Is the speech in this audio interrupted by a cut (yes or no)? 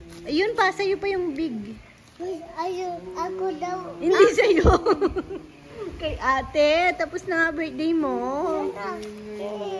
no